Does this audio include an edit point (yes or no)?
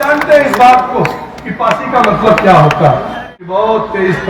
yes